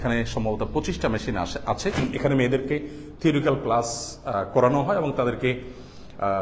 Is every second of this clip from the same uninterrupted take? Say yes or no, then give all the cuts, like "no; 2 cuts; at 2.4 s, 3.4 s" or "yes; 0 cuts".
no; 1 cut; at 2.0 s